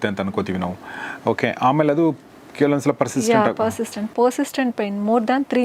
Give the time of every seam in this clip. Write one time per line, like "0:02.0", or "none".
none